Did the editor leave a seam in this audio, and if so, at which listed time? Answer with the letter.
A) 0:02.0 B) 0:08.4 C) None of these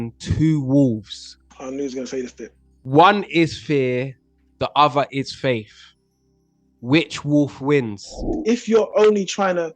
B